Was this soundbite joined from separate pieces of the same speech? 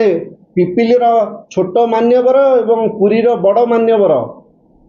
no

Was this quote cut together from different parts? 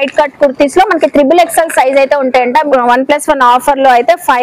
yes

